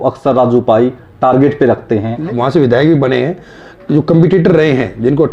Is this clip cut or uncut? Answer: cut